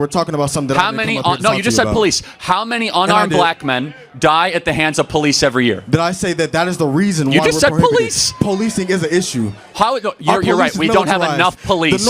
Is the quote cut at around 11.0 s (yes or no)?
no